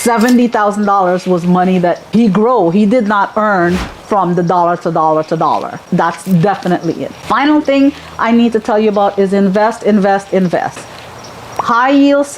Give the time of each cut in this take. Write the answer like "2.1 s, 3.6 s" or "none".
10.8 s